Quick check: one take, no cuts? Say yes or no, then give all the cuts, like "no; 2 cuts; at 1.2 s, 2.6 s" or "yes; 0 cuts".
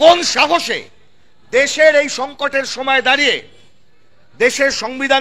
yes; 0 cuts